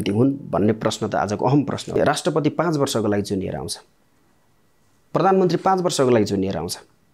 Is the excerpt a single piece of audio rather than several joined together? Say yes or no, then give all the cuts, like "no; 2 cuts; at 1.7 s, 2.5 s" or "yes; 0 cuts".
no; 1 cut; at 2.0 s